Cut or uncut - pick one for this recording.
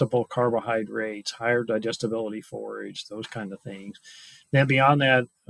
uncut